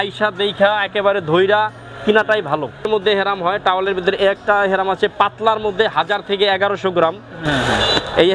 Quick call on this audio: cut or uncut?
cut